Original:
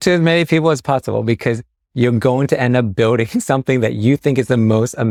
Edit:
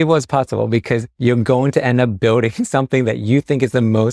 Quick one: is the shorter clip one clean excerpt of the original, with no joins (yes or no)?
no